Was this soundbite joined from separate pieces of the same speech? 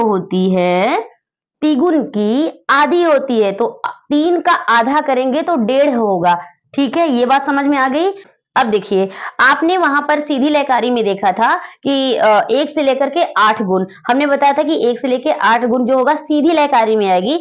no; 0 cuts

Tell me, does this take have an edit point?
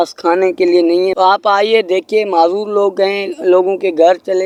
no; 0 cuts

